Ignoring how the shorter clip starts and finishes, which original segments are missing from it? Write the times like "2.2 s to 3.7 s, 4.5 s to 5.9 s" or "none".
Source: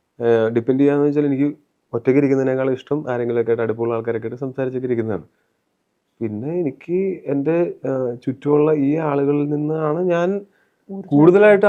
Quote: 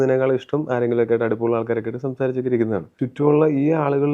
5.4 s to 8.2 s